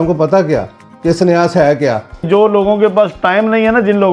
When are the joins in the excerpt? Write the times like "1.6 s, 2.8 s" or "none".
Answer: 2.2 s